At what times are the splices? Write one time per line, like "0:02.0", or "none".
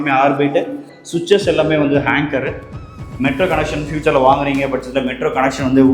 0:03.0